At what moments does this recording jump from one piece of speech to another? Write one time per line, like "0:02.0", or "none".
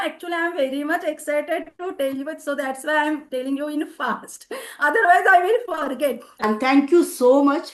0:06.4